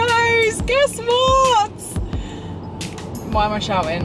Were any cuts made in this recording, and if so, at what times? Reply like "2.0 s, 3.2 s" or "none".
none